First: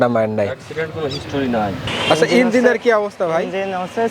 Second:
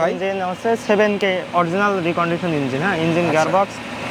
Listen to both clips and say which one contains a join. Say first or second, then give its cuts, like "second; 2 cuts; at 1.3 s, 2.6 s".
first; 1 cut; at 1.9 s